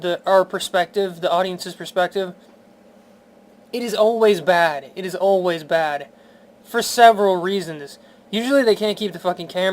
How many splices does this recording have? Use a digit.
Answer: 1